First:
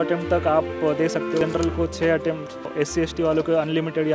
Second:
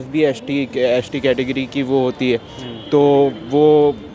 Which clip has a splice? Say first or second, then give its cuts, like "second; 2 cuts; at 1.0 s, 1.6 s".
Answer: first; 2 cuts; at 1.4 s, 2.7 s